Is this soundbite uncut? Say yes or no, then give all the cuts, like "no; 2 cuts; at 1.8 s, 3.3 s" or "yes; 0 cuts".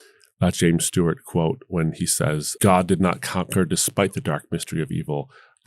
no; 1 cut; at 2.5 s